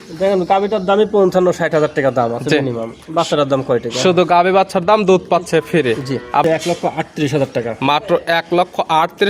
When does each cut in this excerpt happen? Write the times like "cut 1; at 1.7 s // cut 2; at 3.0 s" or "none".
cut 1; at 6.4 s